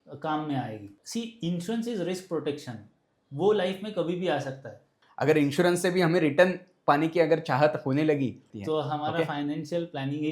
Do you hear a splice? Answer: yes; 3 cuts; at 0.9 s, 5.0 s, 8.5 s

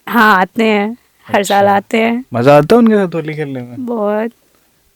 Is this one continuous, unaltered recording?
yes; 0 cuts

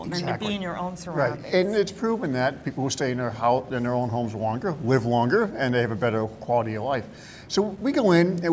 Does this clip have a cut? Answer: yes; 1 cut; at 5.7 s

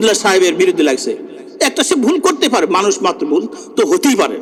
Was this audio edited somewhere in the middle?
no; 0 cuts

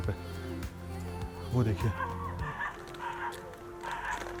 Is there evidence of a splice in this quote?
no; 0 cuts

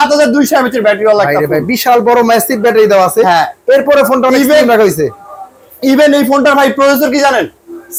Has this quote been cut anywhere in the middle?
no; 0 cuts

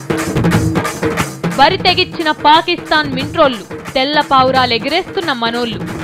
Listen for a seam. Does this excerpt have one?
yes; 1 cut; at 1.2 s

